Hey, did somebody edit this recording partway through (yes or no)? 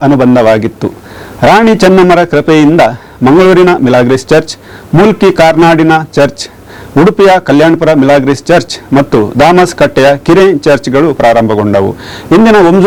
no